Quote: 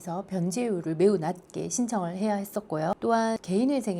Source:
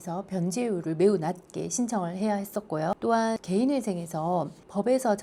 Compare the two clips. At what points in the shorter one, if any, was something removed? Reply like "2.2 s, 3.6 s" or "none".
none